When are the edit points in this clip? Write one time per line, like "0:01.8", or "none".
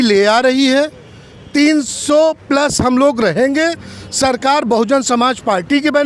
none